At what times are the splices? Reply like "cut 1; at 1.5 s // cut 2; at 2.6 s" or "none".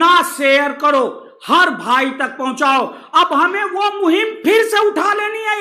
none